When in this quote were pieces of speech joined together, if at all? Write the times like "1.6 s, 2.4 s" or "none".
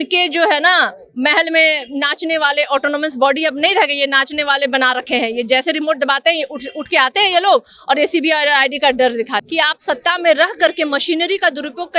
9.4 s